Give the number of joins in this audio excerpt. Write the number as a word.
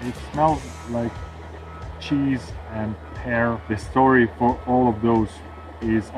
one